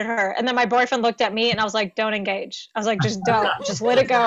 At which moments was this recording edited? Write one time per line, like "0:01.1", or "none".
none